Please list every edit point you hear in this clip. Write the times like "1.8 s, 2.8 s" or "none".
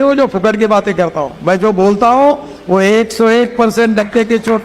none

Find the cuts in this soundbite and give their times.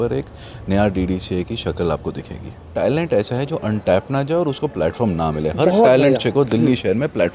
2.6 s

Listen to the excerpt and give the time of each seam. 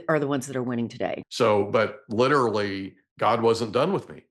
1.2 s

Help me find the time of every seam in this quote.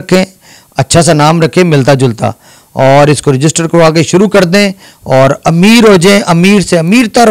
none

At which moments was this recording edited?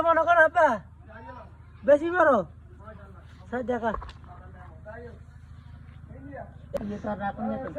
6.6 s

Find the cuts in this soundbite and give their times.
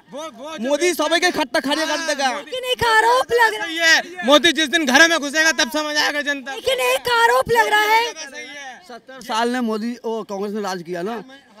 none

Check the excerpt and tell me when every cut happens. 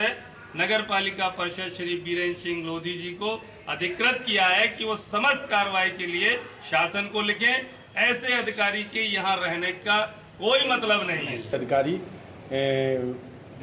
11.5 s

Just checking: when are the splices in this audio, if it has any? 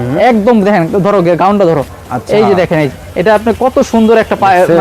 none

